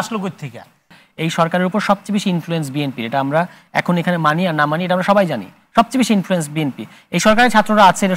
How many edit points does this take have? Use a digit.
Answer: 1